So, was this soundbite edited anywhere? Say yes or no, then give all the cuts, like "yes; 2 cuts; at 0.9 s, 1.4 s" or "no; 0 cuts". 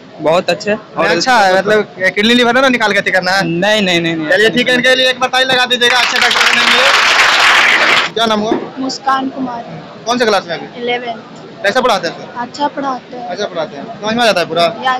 yes; 1 cut; at 8.0 s